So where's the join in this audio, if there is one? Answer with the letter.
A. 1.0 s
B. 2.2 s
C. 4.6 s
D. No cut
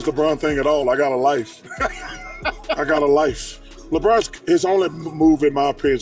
D